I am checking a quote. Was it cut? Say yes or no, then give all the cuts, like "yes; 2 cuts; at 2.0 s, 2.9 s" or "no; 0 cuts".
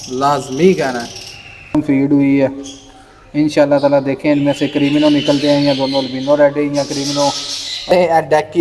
yes; 2 cuts; at 1.8 s, 7.9 s